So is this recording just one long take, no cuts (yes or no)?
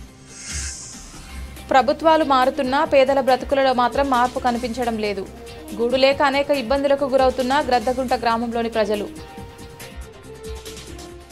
yes